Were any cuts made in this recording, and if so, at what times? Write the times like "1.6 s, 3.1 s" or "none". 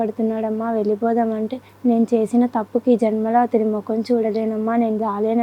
1.6 s